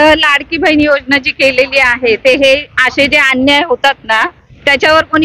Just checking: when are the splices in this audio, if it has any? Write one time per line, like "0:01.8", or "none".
none

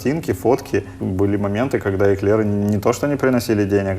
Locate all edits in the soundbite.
0:01.0

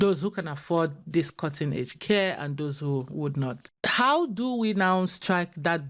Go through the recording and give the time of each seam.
0:03.7

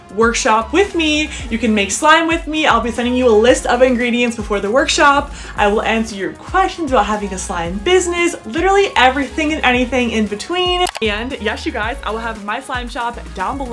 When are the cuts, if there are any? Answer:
0:10.9

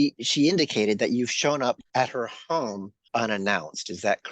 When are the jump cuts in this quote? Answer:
0:01.8
0:02.9

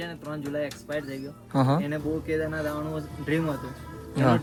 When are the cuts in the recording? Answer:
none

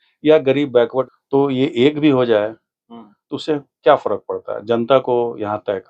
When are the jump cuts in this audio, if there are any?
0:01.1

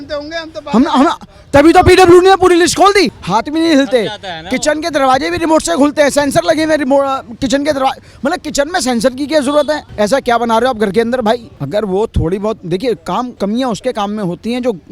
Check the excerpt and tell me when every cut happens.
0:09.9
0:11.5
0:13.3

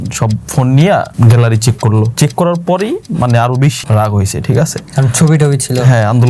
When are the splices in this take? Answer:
0:01.1
0:02.1
0:03.8

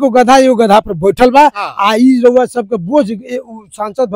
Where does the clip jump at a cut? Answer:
none

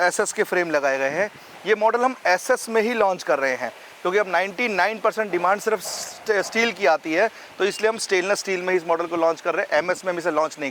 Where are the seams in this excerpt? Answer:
none

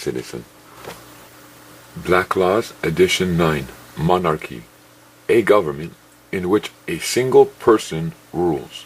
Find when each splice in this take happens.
0:01.1

